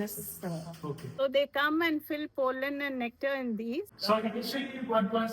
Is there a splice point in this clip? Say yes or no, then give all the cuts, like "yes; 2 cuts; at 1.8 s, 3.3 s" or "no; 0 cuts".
yes; 2 cuts; at 1.2 s, 3.9 s